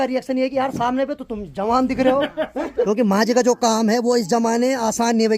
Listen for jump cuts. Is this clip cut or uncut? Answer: cut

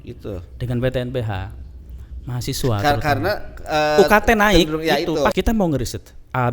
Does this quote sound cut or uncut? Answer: cut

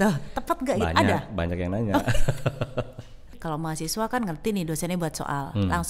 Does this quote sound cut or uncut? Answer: cut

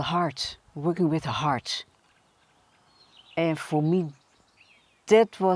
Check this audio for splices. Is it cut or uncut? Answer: uncut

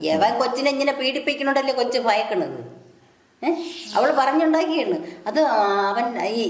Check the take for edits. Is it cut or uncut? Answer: uncut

